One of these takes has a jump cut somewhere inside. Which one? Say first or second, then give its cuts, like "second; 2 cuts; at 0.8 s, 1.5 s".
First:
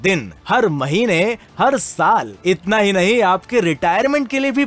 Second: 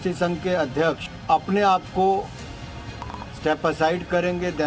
second; 1 cut; at 1.1 s